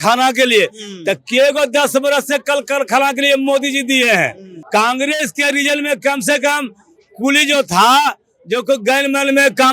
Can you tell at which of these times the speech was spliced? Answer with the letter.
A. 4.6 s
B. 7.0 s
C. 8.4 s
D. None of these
A